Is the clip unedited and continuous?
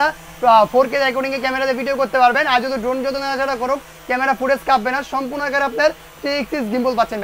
yes; 0 cuts

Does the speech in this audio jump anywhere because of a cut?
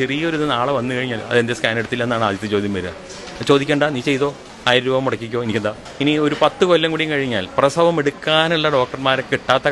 yes; 2 cuts; at 4.5 s, 5.8 s

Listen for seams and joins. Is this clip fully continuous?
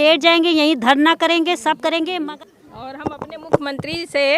no; 1 cut; at 2.2 s

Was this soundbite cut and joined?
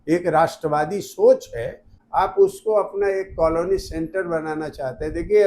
yes; 1 cut; at 1.9 s

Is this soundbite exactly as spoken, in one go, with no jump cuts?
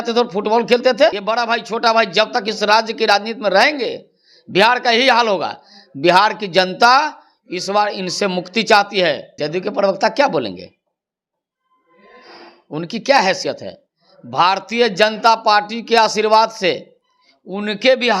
no; 2 cuts; at 1.2 s, 9.3 s

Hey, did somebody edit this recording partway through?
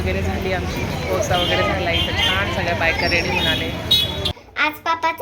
yes; 1 cut; at 4.3 s

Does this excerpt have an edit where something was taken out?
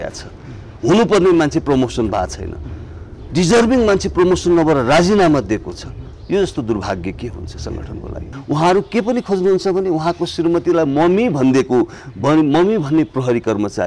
yes; 1 cut; at 8.3 s

